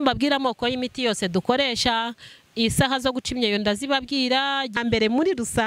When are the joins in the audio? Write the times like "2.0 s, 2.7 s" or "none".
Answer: 4.8 s

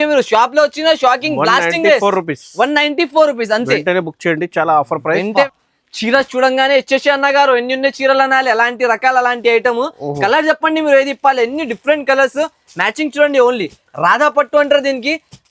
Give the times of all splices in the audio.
none

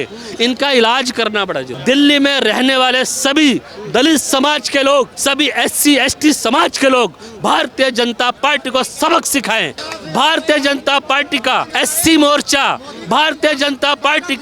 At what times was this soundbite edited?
1.7 s, 9.8 s, 11.7 s

